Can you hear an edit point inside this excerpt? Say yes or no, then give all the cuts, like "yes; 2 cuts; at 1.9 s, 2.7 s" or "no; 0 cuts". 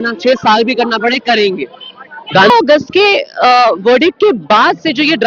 yes; 1 cut; at 2.5 s